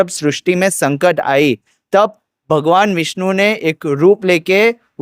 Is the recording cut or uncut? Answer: uncut